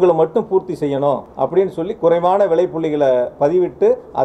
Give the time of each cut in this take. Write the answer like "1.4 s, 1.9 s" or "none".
1.3 s